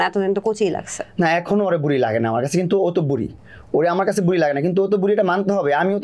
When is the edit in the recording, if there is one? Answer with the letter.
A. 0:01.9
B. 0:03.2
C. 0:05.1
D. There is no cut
D